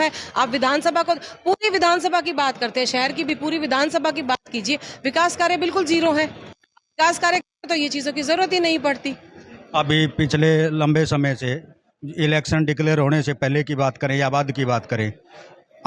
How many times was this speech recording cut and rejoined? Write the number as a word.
zero